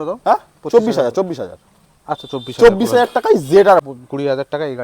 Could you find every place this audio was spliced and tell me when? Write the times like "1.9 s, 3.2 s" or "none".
3.8 s